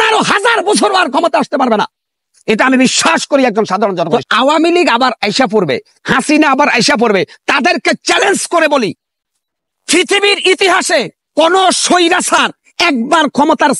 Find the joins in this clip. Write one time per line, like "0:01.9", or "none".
0:04.2